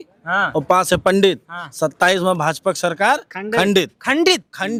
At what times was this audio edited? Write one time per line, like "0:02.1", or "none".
none